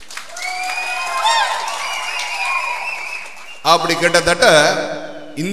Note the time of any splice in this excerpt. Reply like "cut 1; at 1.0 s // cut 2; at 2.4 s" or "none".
none